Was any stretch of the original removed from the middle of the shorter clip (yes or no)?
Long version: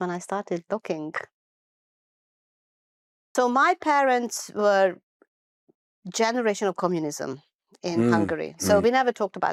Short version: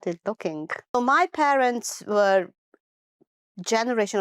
yes